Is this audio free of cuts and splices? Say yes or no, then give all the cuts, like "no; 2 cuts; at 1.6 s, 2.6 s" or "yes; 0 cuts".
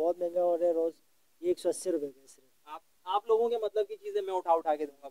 yes; 0 cuts